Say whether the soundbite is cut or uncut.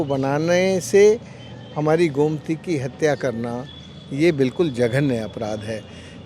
uncut